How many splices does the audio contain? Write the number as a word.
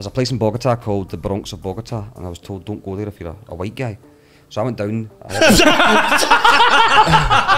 zero